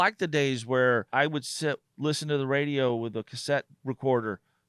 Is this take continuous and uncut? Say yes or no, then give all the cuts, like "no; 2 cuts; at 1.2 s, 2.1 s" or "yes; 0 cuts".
no; 2 cuts; at 1.1 s, 3.7 s